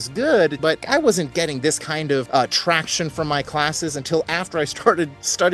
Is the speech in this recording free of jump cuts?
no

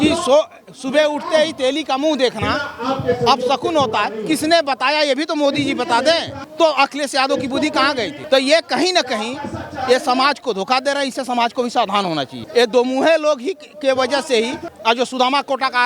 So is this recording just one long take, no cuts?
no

